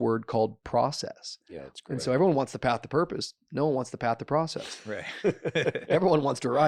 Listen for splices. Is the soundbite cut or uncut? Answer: uncut